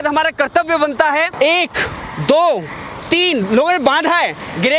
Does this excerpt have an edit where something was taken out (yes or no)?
yes